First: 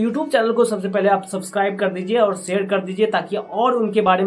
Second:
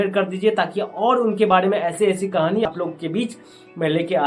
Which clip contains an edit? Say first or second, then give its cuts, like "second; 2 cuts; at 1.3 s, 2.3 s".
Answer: second; 1 cut; at 2.7 s